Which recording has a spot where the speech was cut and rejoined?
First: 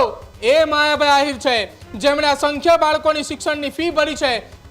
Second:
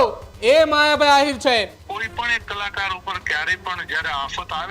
second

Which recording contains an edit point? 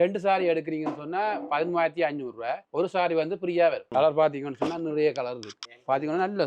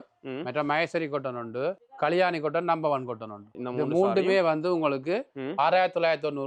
first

